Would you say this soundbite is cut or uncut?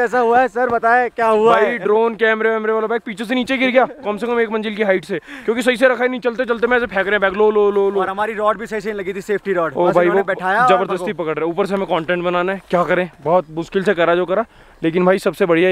uncut